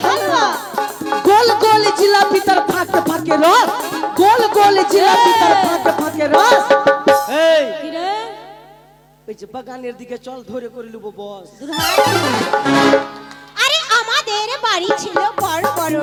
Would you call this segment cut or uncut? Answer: uncut